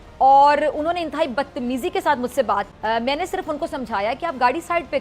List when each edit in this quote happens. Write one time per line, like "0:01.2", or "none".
0:02.7